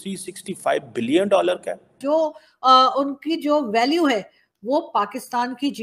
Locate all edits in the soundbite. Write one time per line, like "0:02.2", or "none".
0:02.0